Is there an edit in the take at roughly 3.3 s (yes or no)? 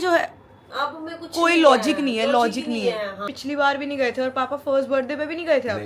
yes